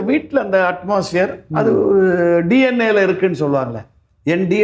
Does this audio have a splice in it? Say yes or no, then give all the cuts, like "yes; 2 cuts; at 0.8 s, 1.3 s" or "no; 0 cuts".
no; 0 cuts